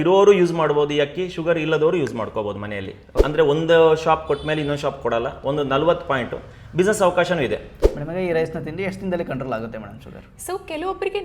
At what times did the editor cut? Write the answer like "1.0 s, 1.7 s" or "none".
3.1 s, 7.8 s